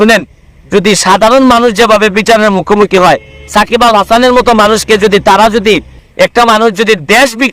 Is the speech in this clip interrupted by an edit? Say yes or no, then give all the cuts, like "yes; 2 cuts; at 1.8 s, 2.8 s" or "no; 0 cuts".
yes; 1 cut; at 6.0 s